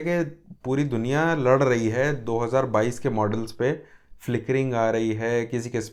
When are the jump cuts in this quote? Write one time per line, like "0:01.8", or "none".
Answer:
none

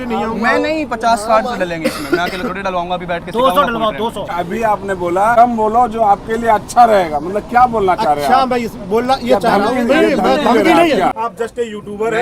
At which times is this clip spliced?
0:04.3
0:05.4
0:11.2

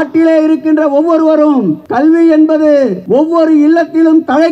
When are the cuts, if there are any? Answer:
0:01.8
0:03.0

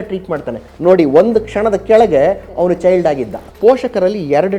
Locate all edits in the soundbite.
0:03.5

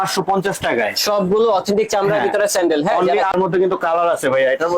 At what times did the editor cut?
0:03.3

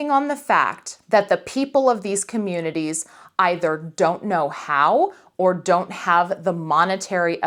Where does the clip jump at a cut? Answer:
none

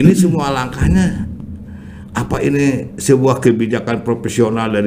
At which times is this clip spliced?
none

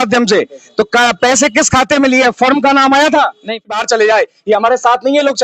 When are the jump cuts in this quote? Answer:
0:03.6

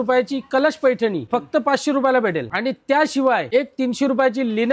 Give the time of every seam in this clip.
none

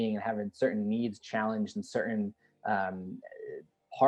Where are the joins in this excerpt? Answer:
none

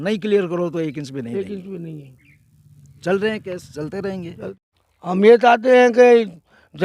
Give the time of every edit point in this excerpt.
0:04.5

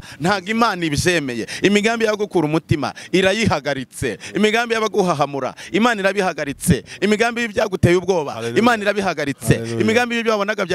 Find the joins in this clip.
none

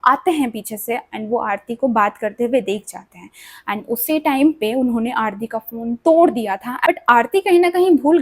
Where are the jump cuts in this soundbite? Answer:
0:06.7

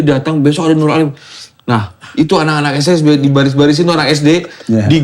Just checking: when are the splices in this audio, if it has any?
0:01.4

